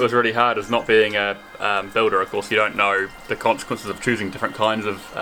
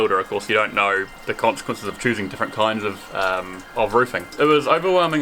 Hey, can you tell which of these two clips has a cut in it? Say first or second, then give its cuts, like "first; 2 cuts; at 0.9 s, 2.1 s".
second; 1 cut; at 4.3 s